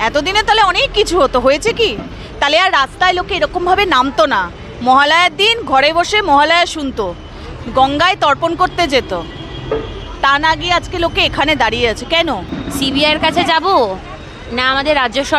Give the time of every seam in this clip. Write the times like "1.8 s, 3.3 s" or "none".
12.5 s